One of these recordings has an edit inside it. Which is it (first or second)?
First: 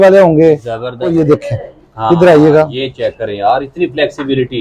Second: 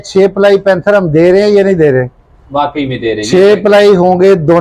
first